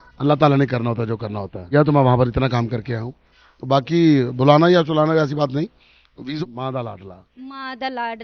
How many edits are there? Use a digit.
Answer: 2